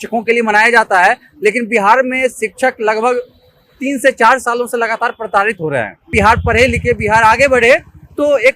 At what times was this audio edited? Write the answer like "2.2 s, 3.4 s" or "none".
6.1 s